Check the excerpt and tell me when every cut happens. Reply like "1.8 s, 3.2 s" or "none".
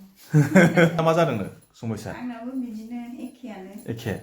1.0 s